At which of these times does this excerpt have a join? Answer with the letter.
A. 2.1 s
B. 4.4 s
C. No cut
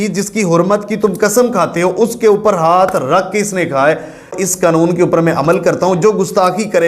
B